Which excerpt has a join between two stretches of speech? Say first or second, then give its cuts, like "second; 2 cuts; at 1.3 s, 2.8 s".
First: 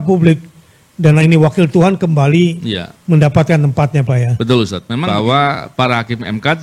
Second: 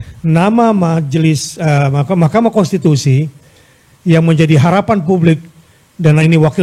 first; 1 cut; at 4.9 s